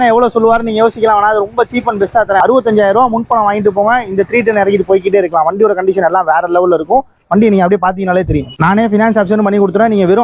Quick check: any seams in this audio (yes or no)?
yes